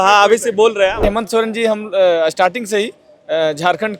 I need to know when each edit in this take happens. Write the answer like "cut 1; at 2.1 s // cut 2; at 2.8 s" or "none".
cut 1; at 1.0 s